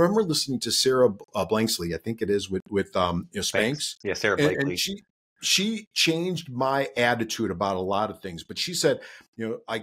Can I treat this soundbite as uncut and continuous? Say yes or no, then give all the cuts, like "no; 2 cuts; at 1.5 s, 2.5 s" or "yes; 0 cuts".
yes; 0 cuts